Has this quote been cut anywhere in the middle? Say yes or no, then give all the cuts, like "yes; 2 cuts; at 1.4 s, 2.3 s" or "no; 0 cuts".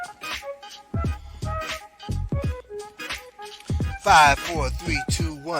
yes; 1 cut; at 2.4 s